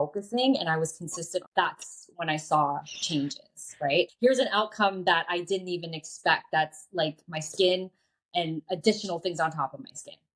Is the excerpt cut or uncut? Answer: cut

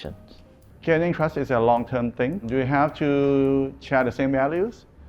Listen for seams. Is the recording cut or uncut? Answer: uncut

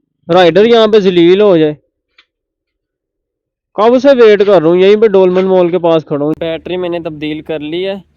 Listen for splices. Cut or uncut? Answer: cut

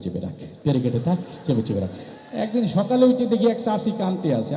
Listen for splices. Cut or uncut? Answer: cut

